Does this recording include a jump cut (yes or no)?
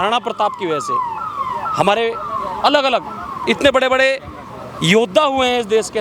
no